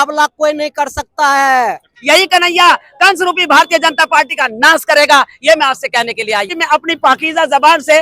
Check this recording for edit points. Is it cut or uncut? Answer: cut